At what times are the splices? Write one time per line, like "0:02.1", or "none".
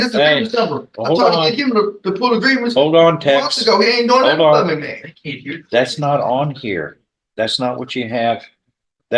none